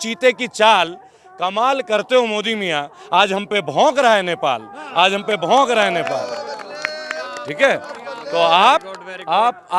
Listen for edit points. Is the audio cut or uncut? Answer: uncut